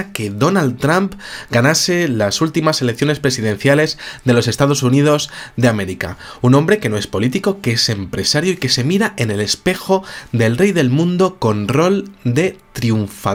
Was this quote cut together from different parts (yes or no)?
no